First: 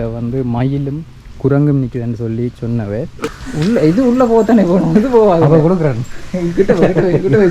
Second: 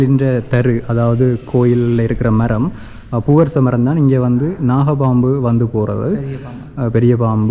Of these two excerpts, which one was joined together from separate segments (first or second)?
first